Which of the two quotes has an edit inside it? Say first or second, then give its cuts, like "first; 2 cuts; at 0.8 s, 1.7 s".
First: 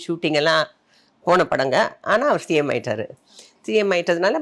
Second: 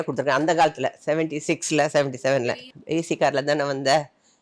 second; 1 cut; at 2.5 s